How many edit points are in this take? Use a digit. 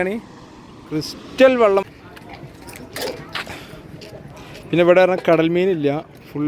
1